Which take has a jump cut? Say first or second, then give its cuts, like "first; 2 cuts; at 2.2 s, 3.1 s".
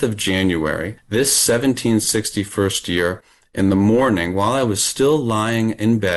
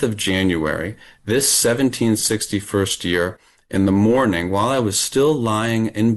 first; 1 cut; at 0.9 s